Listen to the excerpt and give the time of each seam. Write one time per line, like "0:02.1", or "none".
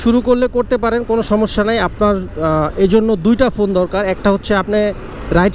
none